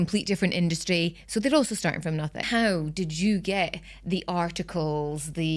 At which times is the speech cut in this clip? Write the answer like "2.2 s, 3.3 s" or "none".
2.4 s